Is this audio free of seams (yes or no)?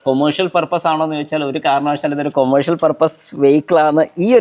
yes